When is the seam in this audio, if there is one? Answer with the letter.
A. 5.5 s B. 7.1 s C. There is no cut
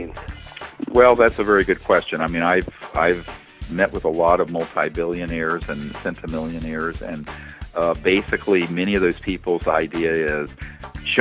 B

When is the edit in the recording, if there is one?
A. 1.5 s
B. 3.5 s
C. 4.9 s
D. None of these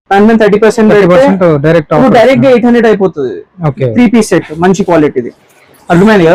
D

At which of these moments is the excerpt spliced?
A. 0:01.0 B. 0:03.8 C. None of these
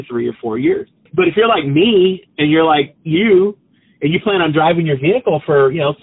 A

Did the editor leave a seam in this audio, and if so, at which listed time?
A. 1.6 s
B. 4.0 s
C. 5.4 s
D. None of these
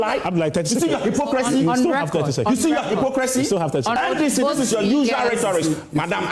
B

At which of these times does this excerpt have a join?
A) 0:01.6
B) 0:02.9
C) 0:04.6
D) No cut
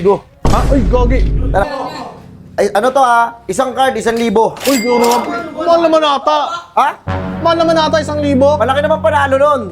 A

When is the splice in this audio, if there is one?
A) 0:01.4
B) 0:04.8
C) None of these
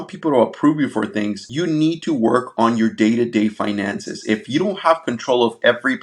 A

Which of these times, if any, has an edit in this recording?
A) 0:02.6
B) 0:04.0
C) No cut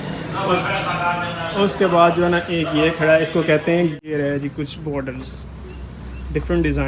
B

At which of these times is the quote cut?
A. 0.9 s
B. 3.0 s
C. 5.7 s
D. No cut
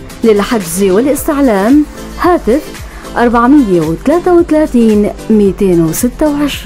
D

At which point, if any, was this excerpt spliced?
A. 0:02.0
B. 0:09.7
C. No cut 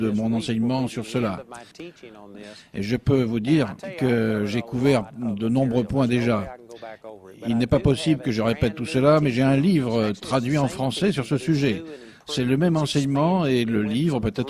C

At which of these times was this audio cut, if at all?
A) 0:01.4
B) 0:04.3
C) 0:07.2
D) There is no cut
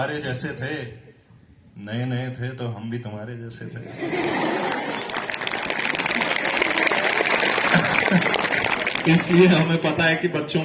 D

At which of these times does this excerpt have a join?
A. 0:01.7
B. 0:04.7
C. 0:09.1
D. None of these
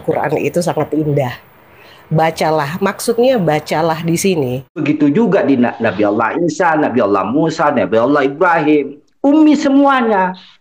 B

